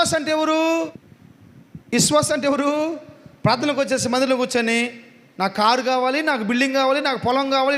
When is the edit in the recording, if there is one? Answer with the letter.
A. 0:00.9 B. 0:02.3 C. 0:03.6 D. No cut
A